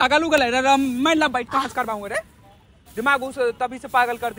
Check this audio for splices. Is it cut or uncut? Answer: uncut